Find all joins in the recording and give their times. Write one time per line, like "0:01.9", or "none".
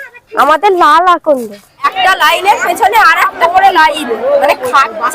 0:01.9